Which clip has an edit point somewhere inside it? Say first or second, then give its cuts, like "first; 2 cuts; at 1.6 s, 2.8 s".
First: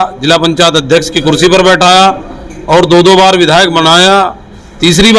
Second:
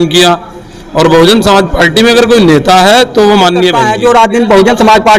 second; 1 cut; at 3.8 s